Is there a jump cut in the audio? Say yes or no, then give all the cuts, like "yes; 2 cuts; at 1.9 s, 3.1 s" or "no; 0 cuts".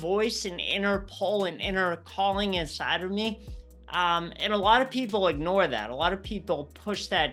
no; 0 cuts